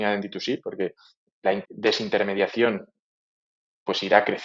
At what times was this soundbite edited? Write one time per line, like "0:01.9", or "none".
none